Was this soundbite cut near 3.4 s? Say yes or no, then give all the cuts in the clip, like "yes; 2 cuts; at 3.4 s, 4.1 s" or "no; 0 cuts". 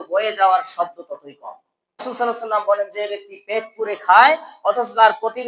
no; 1 cut; at 2.1 s